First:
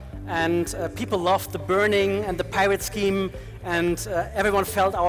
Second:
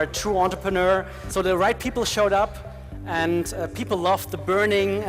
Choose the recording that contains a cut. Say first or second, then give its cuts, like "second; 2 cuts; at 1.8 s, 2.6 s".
second; 1 cut; at 1.2 s